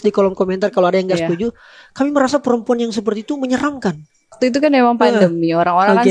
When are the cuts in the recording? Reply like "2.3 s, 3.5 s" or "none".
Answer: 4.4 s